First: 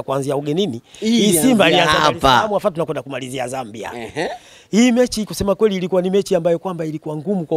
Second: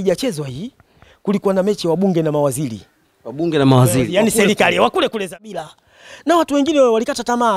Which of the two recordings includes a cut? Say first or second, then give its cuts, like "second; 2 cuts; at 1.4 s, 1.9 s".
second; 1 cut; at 5.2 s